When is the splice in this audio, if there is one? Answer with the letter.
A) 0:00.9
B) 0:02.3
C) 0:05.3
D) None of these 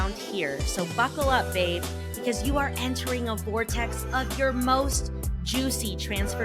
D